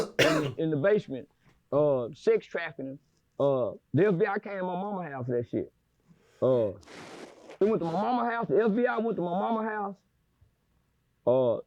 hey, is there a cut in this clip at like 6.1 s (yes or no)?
no